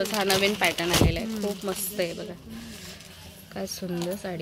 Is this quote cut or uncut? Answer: uncut